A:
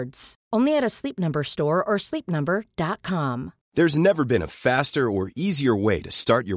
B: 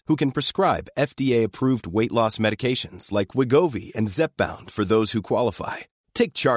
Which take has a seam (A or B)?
A